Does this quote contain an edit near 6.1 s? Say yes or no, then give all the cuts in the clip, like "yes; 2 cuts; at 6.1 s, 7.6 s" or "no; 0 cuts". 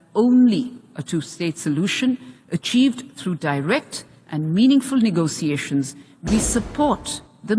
yes; 1 cut; at 6.1 s